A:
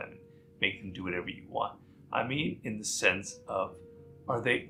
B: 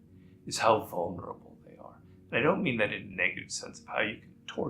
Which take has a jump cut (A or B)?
B